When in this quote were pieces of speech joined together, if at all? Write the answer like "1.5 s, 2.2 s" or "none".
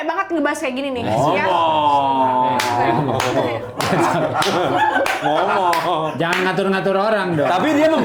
none